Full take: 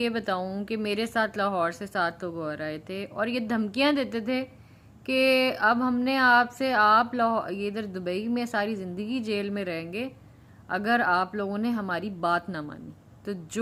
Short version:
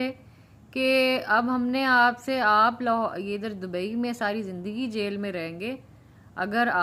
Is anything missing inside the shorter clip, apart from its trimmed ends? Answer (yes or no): no